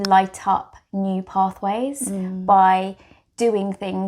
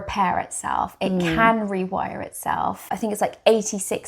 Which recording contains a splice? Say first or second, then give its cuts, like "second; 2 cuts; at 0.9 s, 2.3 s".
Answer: second; 1 cut; at 2.8 s